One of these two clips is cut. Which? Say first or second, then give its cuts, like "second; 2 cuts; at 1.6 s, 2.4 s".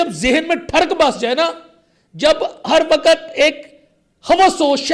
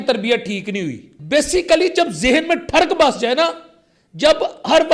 second; 1 cut; at 1.1 s